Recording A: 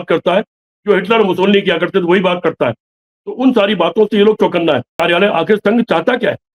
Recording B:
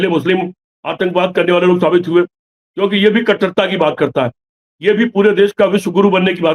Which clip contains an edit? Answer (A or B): A